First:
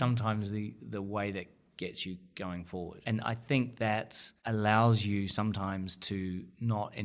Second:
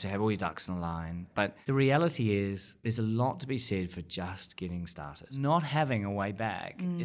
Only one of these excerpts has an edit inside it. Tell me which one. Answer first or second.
second